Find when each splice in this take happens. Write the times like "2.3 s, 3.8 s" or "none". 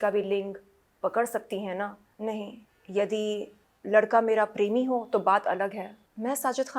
none